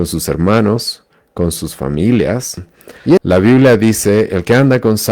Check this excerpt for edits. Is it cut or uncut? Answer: cut